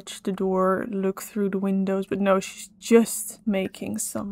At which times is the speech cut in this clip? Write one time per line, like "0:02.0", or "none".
0:03.3

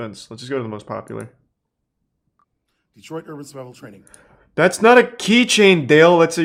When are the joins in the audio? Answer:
none

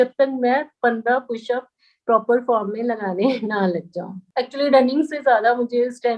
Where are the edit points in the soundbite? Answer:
0:04.2

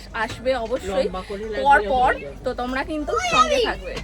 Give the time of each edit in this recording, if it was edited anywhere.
none

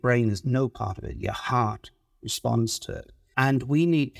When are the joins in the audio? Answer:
0:03.1

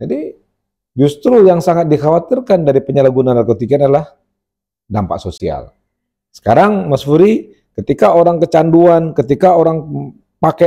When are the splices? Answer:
none

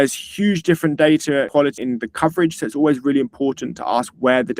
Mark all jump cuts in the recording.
0:01.6

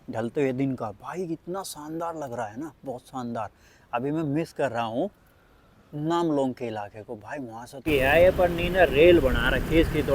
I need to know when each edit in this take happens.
0:07.9

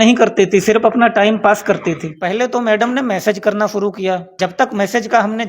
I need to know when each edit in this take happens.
0:02.1
0:04.3

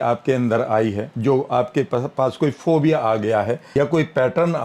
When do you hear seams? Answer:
0:01.1
0:03.6

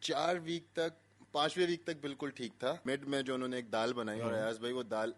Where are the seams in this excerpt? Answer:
0:02.8

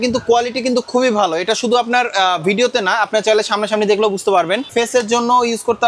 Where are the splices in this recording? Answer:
0:04.7

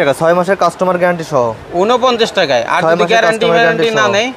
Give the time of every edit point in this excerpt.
none

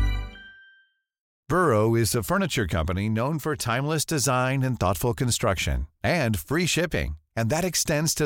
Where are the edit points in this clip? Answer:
0:01.3

